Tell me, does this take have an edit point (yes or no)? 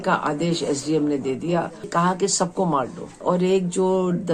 yes